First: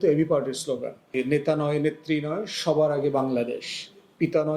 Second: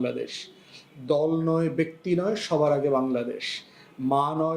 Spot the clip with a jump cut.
first; 1 cut; at 1.2 s

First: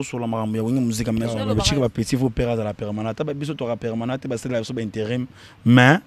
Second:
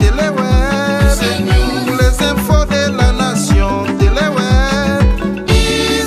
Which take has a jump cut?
first; 1 cut; at 1.4 s

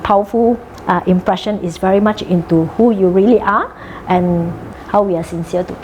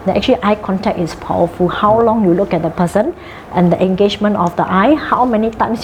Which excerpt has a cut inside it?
first; 1 cut; at 4.7 s

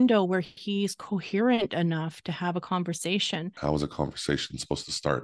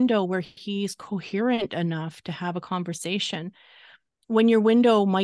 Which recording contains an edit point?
first; 1 cut; at 3.5 s

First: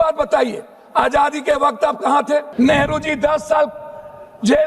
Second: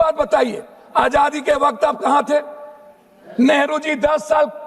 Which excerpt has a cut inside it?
first; 1 cut; at 2.5 s

